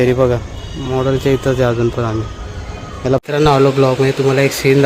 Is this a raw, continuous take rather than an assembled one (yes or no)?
no